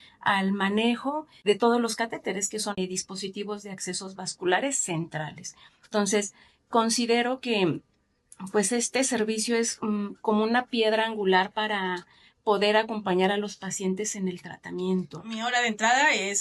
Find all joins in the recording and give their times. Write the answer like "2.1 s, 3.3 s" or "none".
15.4 s